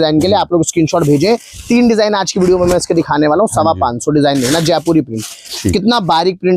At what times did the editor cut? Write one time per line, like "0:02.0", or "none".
none